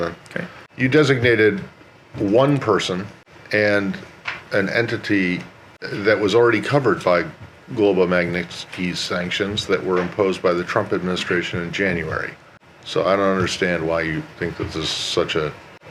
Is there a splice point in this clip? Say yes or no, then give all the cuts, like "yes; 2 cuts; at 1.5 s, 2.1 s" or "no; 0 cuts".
no; 0 cuts